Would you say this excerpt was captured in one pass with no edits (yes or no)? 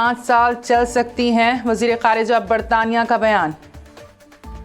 yes